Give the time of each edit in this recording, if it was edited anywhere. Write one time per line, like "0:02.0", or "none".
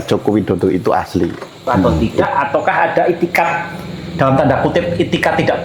0:01.8